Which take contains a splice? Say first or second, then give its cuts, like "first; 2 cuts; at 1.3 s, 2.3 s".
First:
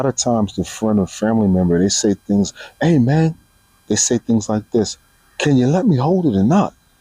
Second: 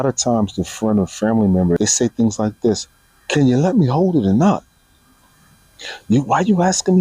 second; 1 cut; at 1.8 s